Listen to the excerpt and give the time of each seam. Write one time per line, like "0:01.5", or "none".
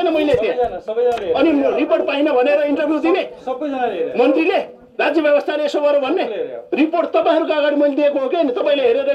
none